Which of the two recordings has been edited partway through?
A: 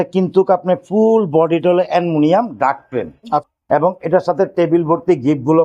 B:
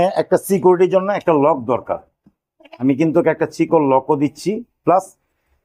A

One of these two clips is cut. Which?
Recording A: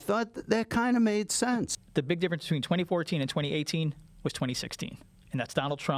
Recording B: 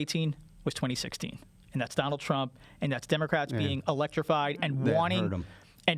A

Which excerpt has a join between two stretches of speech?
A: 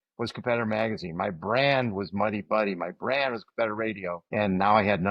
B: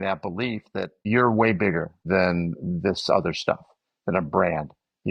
A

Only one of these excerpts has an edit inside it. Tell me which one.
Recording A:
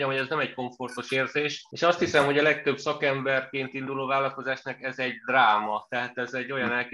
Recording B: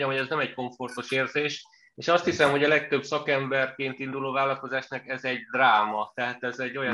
A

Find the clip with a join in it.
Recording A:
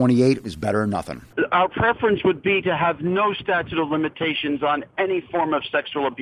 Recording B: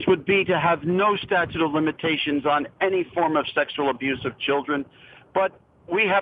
A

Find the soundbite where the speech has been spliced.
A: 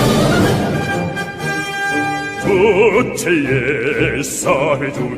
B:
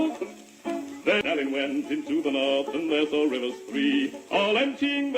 B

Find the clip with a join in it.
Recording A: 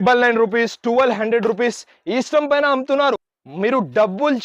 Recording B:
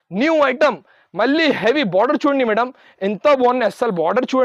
A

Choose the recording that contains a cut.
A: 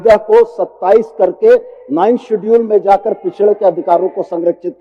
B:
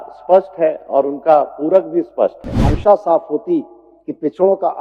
B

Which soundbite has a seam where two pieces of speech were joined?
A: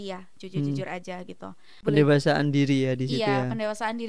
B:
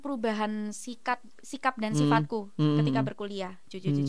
A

